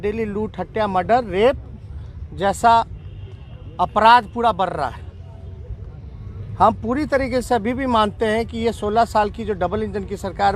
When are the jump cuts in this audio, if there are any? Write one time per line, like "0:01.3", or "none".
none

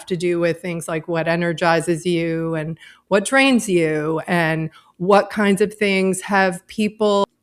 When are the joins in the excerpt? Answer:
none

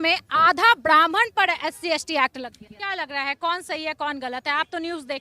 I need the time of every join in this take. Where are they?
0:02.7

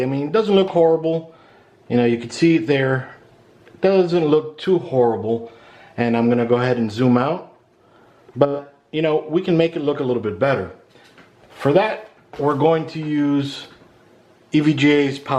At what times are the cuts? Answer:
none

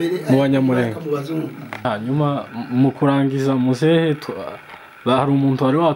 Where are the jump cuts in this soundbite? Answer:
0:01.9

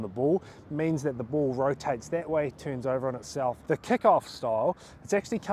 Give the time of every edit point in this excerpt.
0:03.6

